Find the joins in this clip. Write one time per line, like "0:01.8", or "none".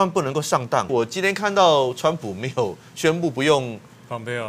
0:00.9

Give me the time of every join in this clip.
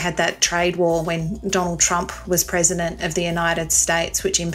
none

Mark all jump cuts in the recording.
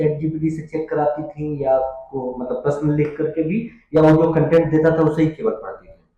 none

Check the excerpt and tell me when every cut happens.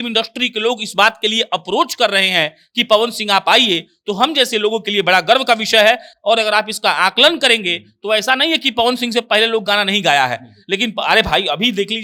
none

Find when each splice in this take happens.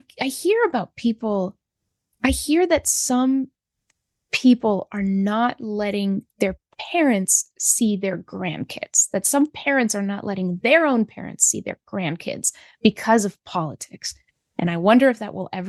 none

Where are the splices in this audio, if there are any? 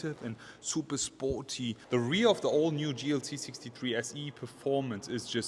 0:01.8

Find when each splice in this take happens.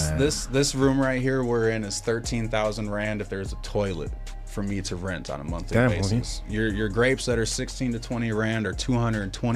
none

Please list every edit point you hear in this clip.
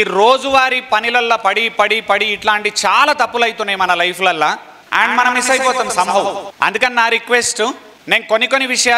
0:04.7
0:06.4
0:07.9

